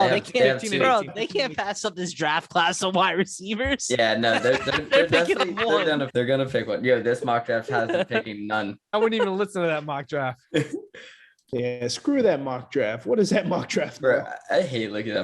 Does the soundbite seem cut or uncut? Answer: cut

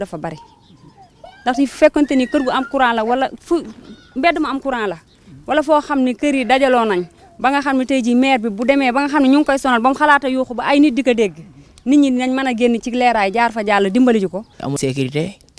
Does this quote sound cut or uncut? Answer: cut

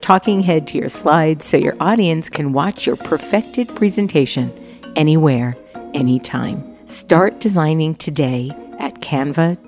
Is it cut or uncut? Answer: uncut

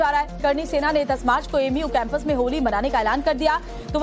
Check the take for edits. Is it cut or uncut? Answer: uncut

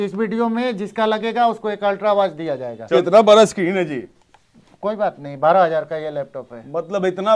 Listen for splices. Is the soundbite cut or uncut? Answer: cut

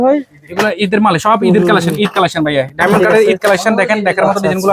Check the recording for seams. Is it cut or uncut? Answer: uncut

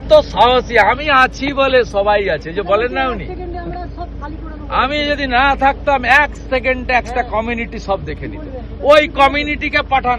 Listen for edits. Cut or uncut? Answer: uncut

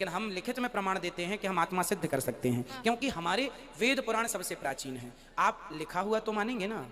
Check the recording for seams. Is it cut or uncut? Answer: uncut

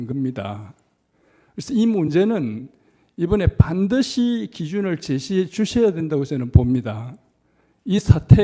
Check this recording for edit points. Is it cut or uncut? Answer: uncut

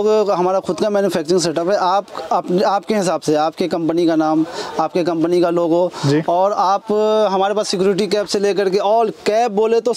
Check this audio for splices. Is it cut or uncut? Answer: uncut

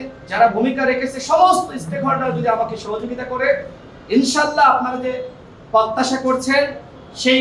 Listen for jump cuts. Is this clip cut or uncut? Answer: uncut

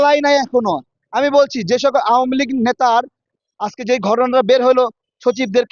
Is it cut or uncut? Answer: cut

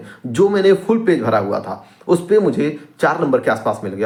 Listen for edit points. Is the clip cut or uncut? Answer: uncut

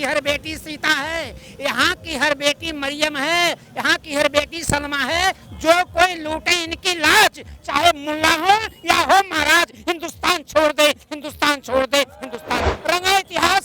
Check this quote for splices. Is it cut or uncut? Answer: cut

